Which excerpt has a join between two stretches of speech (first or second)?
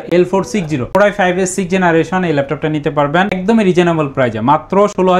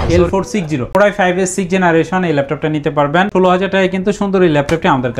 second